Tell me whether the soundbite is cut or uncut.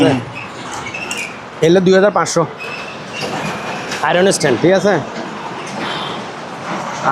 uncut